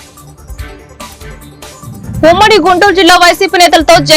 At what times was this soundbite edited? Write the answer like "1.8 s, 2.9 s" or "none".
1.0 s